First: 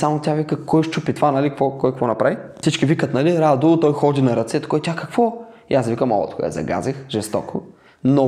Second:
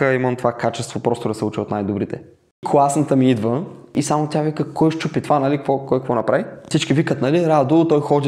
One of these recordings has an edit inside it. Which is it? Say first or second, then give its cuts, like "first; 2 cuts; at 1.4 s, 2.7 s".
second; 1 cut; at 2.6 s